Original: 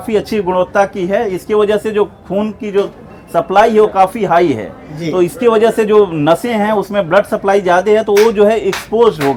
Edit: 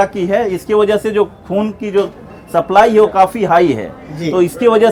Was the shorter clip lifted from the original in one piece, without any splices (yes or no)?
yes